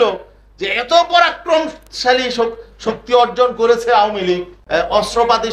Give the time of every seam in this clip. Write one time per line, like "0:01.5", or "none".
0:04.5